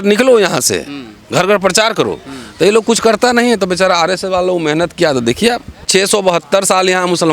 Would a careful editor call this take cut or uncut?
cut